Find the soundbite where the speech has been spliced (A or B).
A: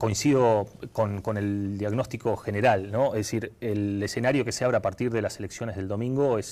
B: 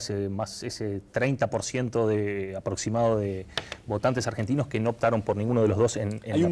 B